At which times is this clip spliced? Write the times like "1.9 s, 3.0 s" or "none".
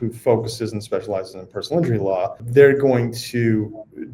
2.4 s